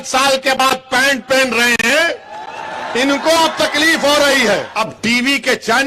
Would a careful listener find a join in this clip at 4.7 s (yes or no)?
yes